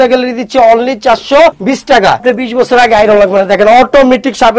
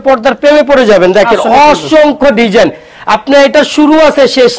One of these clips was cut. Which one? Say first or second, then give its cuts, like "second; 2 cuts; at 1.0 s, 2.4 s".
first; 1 cut; at 2.2 s